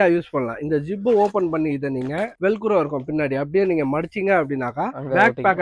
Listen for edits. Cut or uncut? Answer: uncut